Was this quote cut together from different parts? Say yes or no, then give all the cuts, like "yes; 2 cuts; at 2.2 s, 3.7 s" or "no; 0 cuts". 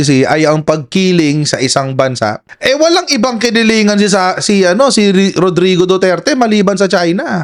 no; 0 cuts